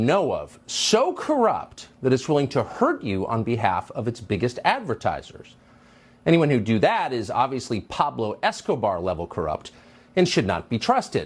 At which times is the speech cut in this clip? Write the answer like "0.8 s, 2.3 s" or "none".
none